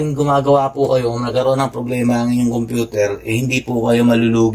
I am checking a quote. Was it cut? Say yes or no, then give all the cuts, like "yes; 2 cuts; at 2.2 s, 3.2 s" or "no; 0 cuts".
no; 0 cuts